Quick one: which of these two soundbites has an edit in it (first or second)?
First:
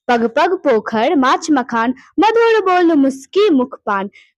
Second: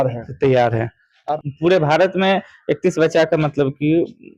second